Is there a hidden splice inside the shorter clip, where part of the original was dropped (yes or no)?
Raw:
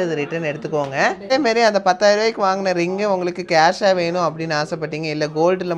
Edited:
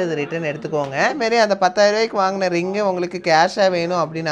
yes